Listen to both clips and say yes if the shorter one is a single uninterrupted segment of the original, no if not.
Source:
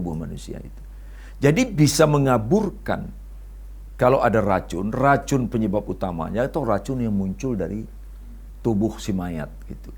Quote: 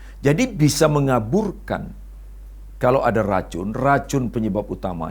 yes